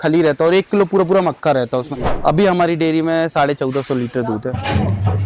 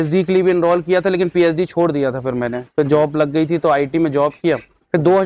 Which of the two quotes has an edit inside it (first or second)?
first